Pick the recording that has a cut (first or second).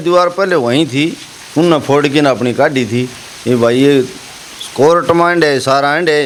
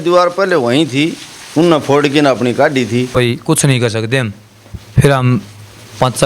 second